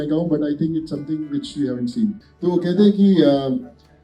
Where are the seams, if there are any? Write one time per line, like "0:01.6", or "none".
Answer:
0:02.2